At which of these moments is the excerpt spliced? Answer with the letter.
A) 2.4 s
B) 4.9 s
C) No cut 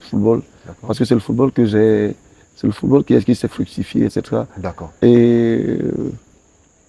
C